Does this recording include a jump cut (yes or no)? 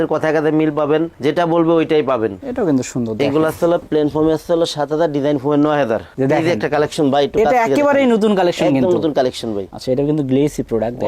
yes